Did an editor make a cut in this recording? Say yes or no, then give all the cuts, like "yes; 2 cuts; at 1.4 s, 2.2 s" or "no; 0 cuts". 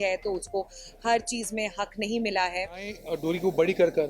yes; 1 cut; at 3.0 s